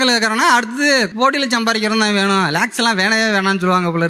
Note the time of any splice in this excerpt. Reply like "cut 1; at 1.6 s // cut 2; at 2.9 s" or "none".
none